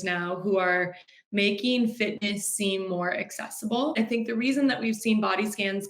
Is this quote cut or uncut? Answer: cut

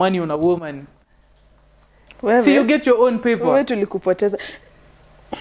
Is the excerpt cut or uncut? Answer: uncut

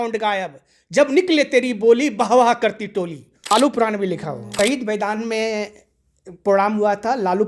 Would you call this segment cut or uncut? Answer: cut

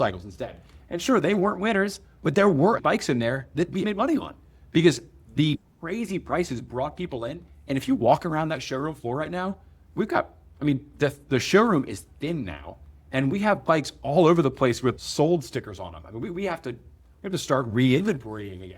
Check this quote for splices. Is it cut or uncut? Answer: cut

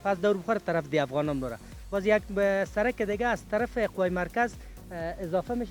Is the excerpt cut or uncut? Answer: uncut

